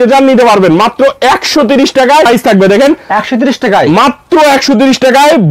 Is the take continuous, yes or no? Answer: no